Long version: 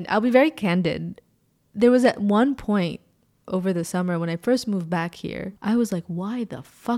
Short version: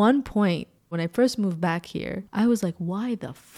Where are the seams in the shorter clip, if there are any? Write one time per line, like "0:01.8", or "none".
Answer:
0:00.9